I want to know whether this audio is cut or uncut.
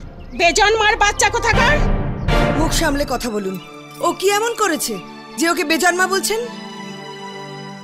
uncut